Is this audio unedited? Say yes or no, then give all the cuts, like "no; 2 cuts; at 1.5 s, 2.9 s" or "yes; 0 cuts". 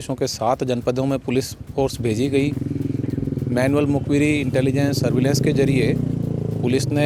yes; 0 cuts